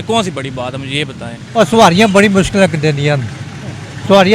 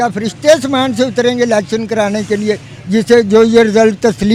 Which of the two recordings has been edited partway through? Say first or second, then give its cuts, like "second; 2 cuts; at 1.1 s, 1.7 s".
first; 1 cut; at 1.4 s